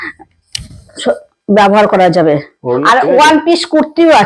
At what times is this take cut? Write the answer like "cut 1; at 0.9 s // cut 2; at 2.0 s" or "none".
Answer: cut 1; at 2.5 s